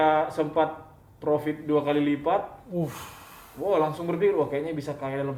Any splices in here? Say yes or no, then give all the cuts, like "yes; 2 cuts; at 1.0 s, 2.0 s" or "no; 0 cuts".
no; 0 cuts